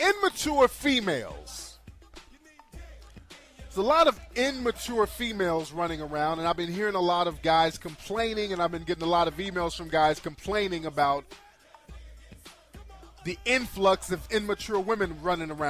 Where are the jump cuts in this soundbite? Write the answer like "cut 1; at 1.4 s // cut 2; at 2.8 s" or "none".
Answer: cut 1; at 13.7 s